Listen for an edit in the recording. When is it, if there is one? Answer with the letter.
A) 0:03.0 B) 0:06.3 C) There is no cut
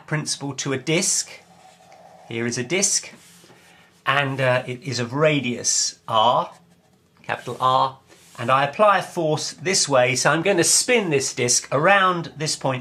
C